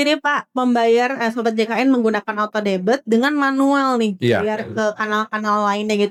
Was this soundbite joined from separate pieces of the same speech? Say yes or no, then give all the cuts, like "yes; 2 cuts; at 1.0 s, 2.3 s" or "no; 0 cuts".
no; 0 cuts